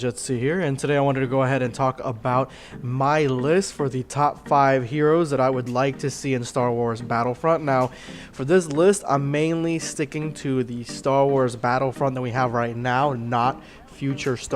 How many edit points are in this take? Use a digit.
1